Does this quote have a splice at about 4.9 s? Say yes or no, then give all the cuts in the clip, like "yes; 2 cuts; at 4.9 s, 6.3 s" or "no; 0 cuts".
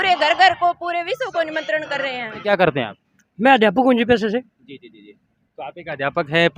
no; 1 cut; at 2.4 s